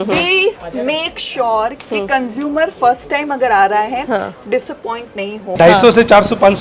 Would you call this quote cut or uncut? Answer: cut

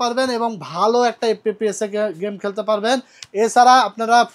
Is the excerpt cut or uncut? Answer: uncut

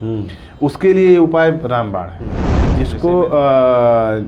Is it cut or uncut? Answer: cut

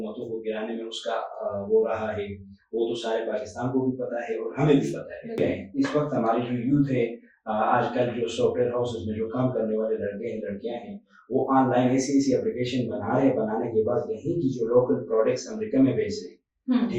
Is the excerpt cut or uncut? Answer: cut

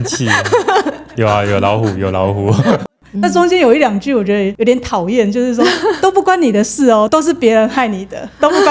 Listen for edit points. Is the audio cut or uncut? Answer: cut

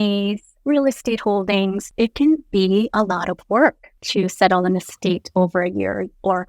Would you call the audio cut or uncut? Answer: cut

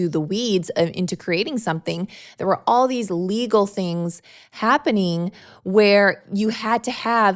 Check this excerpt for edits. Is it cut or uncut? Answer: uncut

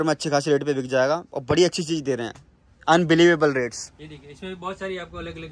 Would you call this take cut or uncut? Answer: uncut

